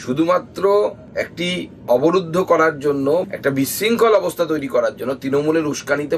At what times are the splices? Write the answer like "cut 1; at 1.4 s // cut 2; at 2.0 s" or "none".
none